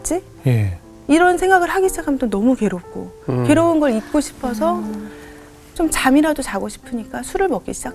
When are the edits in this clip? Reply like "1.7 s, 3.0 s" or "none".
none